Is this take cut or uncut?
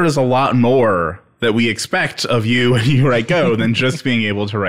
uncut